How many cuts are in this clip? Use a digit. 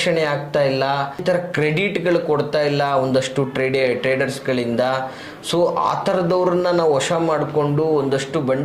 1